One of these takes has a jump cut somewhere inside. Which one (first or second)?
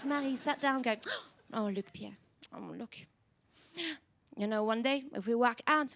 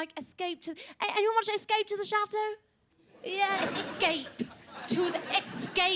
second